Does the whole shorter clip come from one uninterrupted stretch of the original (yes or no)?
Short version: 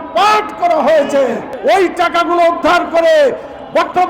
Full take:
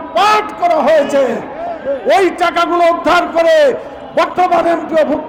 no